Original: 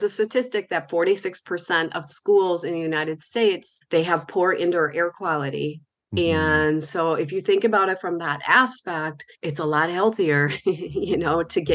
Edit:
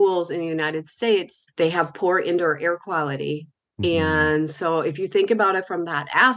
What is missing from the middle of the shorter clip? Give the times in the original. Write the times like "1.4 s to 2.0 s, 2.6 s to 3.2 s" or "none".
none